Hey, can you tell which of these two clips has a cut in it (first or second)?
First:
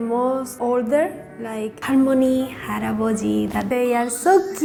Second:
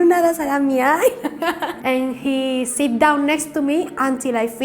second